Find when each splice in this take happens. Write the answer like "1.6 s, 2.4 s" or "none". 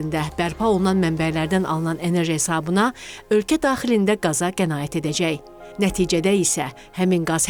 none